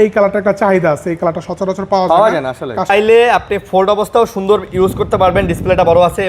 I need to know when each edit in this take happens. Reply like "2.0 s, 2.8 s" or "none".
2.9 s